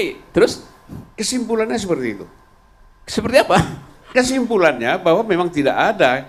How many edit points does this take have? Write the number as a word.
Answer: zero